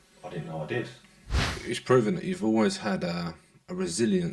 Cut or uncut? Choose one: cut